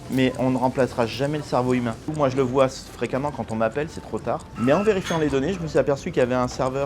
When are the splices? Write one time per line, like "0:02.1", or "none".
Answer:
0:02.1
0:04.5